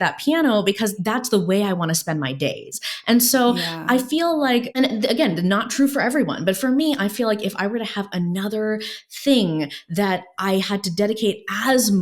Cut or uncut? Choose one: cut